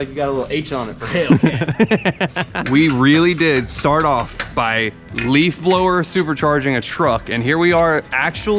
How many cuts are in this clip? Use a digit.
1